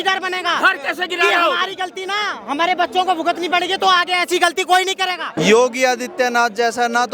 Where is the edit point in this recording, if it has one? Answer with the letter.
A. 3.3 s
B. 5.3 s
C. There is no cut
B